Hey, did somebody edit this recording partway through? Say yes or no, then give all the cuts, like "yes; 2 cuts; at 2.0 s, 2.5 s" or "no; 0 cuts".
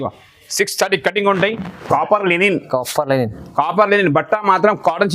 yes; 1 cut; at 1.8 s